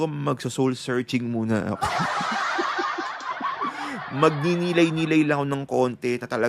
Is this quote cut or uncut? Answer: uncut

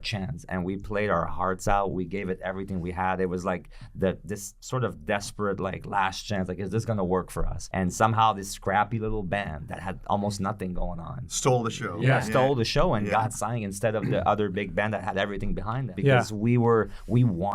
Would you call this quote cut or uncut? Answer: cut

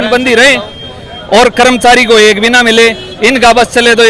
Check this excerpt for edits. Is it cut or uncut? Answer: uncut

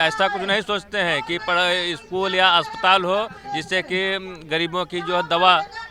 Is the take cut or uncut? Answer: uncut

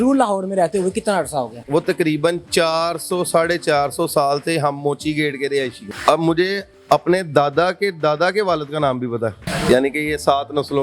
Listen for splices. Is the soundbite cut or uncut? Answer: cut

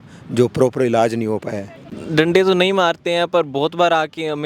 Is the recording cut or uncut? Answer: cut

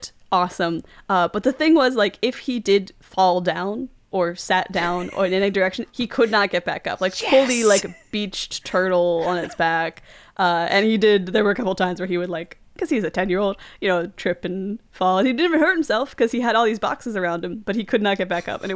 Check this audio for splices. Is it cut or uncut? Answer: uncut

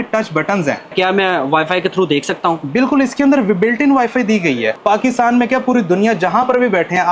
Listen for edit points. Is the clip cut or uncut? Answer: cut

